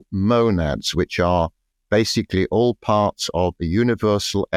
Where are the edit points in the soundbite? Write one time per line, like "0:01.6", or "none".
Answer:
none